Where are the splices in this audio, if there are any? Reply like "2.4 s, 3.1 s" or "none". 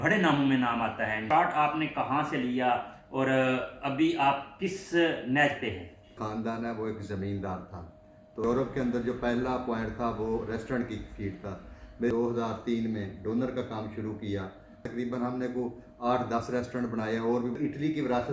1.2 s, 6.2 s, 8.4 s, 12.1 s, 14.8 s, 17.5 s